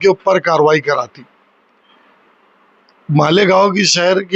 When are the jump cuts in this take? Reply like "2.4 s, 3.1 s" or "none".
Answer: none